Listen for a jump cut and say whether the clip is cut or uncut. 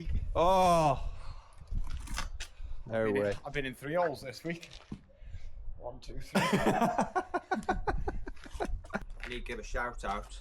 cut